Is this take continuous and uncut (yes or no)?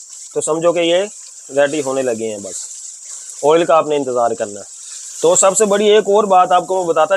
yes